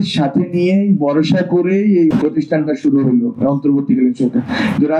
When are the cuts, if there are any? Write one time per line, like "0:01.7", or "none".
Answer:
none